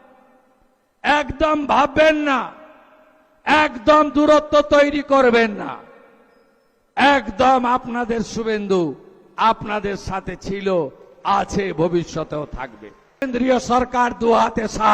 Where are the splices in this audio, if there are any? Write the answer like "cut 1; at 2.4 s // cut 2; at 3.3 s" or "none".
cut 1; at 13.2 s